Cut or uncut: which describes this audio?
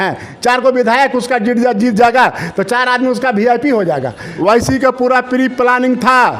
cut